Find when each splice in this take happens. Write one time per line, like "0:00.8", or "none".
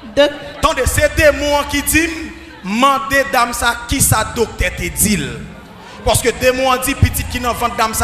none